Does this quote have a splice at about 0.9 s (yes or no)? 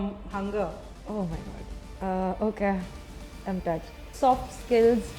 yes